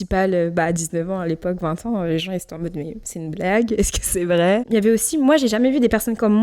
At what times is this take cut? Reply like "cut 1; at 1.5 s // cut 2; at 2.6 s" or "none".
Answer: cut 1; at 4.6 s